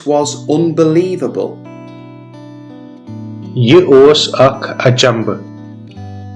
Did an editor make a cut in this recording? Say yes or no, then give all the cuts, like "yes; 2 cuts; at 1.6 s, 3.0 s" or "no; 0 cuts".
no; 0 cuts